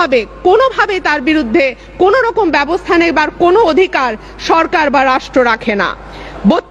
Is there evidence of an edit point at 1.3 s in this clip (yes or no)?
no